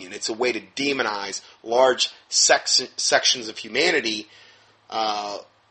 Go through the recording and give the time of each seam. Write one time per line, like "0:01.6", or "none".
none